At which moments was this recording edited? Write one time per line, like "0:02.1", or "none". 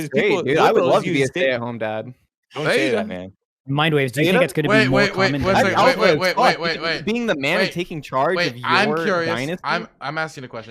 none